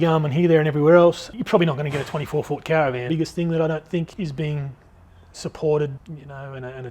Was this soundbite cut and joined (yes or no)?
yes